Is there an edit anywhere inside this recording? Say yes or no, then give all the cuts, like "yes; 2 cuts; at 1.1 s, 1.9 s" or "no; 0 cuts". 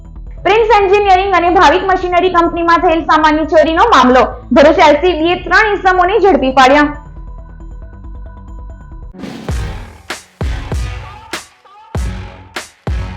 yes; 1 cut; at 9.1 s